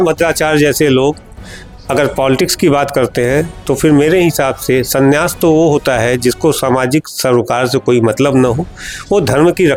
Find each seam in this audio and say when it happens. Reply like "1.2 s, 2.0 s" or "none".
none